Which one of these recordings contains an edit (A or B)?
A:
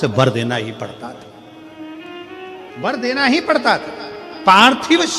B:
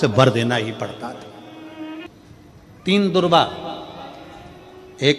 B